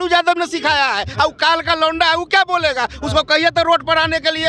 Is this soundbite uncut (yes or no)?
yes